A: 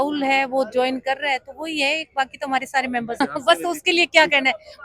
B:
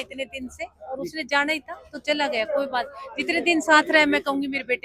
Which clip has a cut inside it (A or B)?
A